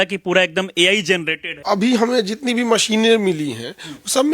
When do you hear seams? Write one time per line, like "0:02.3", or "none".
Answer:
0:01.5